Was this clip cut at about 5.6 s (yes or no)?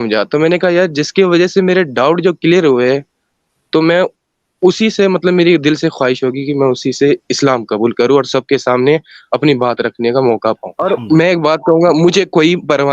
no